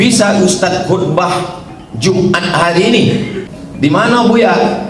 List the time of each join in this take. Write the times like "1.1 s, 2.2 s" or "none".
3.4 s